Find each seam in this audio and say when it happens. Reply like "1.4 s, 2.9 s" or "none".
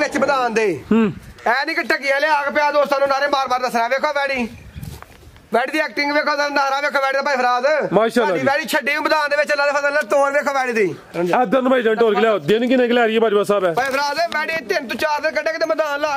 none

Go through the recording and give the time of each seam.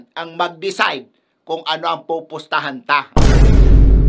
3.1 s

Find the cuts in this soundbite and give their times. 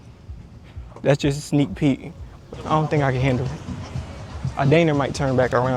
2.4 s

